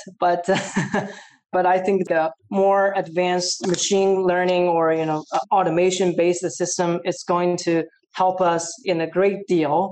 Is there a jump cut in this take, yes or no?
yes